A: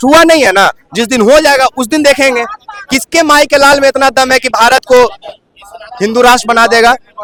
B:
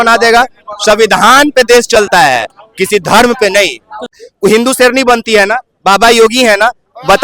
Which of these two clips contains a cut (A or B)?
B